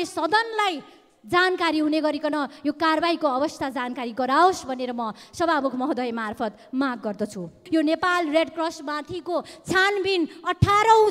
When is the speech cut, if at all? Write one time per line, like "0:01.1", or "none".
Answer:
0:07.6